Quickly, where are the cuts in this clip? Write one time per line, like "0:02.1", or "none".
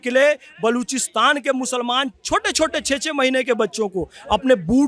none